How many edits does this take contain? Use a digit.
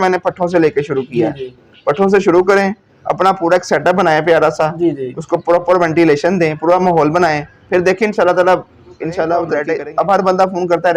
1